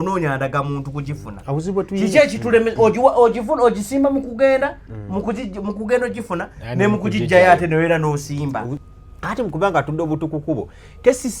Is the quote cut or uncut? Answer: cut